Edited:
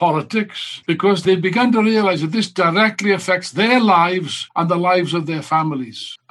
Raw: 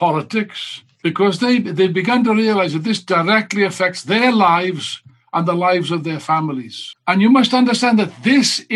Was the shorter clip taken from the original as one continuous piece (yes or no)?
no